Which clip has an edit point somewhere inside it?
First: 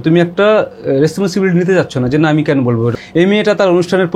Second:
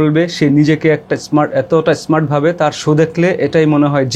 first; 1 cut; at 3.0 s

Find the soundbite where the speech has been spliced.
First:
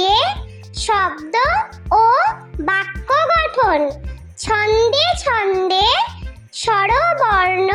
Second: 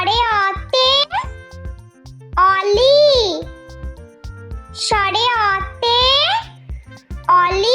second; 2 cuts; at 3.5 s, 4.9 s

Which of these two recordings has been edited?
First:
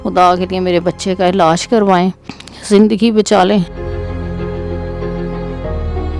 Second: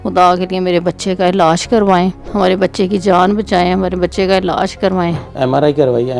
second; 2 cuts; at 2.2 s, 5.2 s

